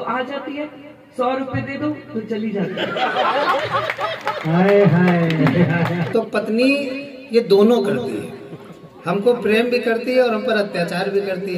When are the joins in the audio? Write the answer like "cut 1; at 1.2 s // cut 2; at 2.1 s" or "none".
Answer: cut 1; at 6.0 s

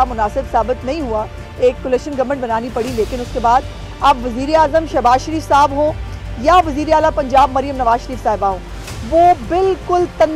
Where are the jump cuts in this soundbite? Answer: none

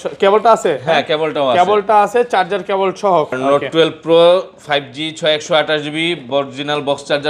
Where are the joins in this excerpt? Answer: cut 1; at 3.3 s

